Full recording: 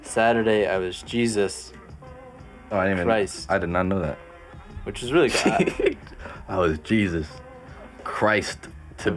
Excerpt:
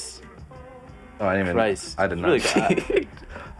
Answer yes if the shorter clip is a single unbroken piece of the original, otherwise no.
no